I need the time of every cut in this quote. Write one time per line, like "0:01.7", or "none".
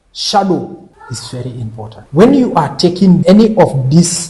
0:00.9
0:02.0
0:03.2

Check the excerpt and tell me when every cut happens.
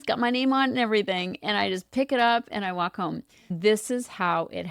0:03.5

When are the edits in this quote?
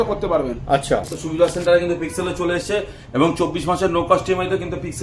0:01.2

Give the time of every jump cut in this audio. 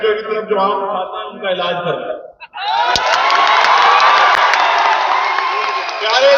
none

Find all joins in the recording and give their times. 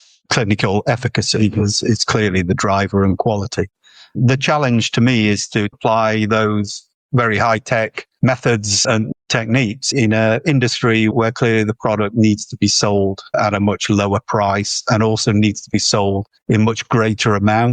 none

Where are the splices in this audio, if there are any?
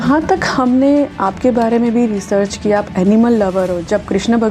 none

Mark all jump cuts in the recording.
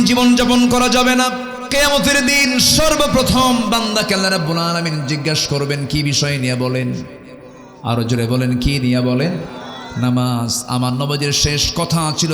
0:01.6

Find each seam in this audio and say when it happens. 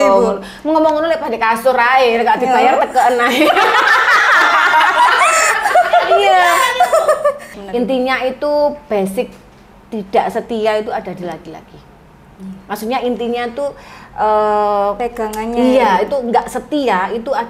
0:07.5

